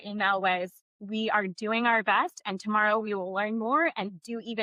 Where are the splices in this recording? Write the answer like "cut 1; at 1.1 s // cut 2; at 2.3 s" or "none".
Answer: none